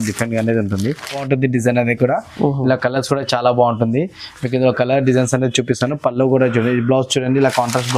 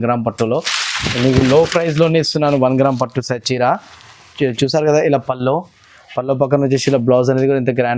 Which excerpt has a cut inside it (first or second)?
first